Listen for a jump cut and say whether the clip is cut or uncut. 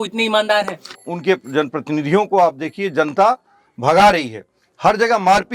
cut